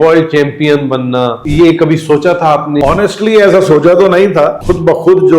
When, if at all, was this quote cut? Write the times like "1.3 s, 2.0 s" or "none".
1.4 s, 2.8 s, 4.6 s

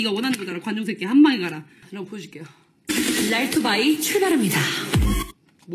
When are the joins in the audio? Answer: 1.8 s

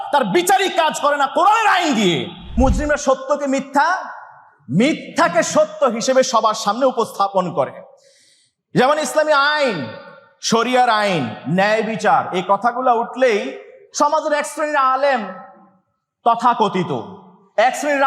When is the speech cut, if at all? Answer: 2.5 s

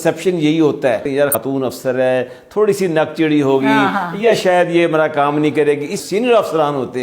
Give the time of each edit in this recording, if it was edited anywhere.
1.3 s, 6.0 s

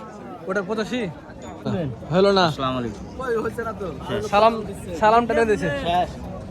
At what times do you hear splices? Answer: 1.7 s

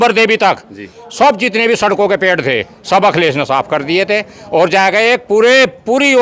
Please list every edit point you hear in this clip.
none

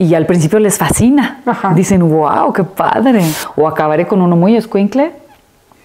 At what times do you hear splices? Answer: 3.4 s

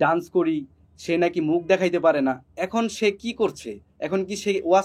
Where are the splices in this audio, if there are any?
none

